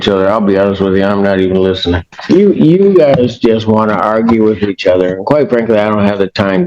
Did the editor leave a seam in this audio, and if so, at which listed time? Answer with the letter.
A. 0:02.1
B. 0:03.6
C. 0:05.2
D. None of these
A